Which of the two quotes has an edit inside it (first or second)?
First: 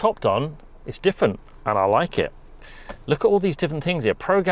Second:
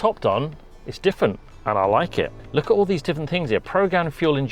second